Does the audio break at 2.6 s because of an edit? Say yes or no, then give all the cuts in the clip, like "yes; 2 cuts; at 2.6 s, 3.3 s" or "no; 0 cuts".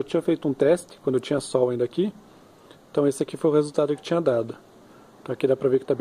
no; 0 cuts